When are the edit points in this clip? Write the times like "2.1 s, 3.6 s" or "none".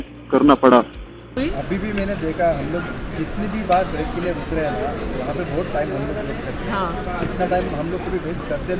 1.4 s

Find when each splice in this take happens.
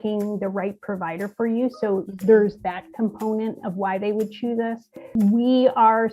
5.1 s

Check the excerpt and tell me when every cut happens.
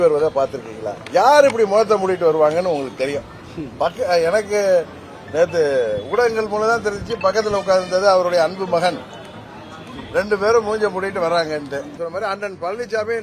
12.0 s

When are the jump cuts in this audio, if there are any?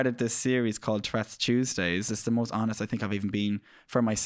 2.1 s

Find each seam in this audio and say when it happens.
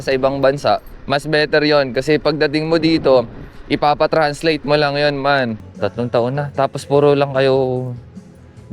0.9 s, 5.6 s

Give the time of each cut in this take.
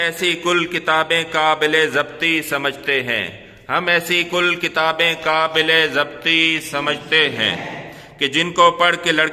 none

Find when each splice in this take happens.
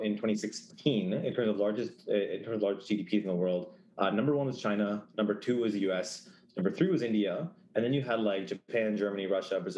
none

